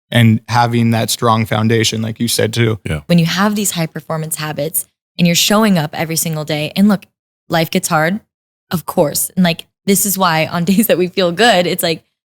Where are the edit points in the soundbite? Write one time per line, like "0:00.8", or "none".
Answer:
0:03.0